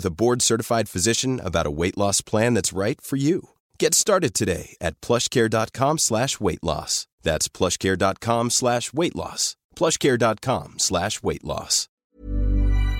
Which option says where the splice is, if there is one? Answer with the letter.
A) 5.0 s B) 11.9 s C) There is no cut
B